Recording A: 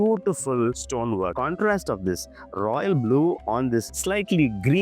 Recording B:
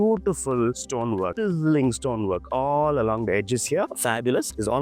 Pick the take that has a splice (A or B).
A